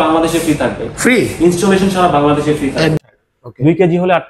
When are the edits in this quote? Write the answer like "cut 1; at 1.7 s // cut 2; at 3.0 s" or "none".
cut 1; at 3.0 s